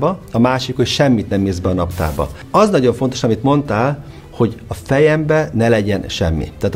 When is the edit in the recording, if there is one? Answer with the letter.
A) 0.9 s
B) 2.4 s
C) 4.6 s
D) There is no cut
B